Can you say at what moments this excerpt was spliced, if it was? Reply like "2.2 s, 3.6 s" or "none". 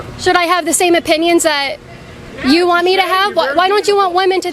none